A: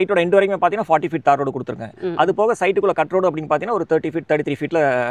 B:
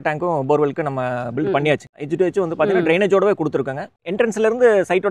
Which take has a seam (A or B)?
B